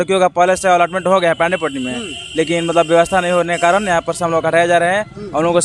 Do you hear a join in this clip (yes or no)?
no